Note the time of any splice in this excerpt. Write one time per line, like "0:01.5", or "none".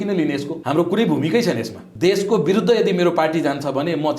0:01.8

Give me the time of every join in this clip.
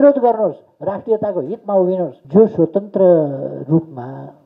0:02.2

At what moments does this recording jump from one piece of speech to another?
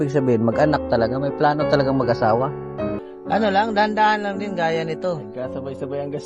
0:03.1

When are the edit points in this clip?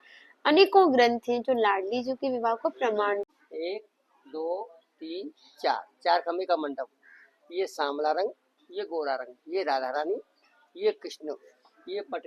0:03.3

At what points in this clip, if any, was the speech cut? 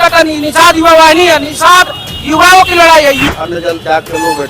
0:03.2

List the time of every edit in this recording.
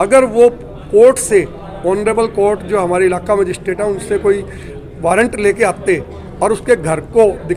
none

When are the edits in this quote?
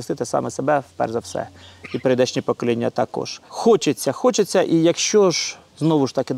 none

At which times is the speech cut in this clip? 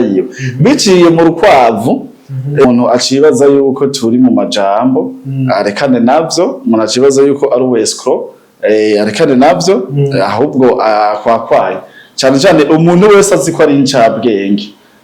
0:02.6

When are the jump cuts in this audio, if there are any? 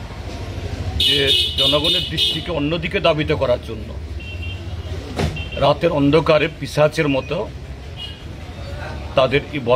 none

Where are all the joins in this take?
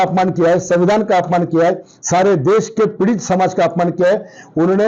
none

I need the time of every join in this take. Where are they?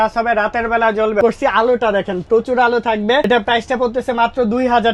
0:01.2
0:03.3

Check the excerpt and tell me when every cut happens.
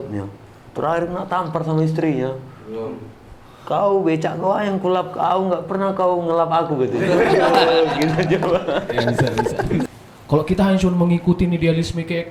0:09.9

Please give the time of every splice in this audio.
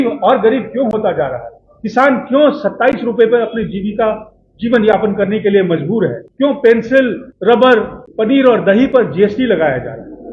0:06.2
0:07.2
0:08.0

